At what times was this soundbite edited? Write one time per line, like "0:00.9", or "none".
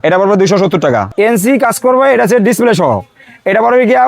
0:01.1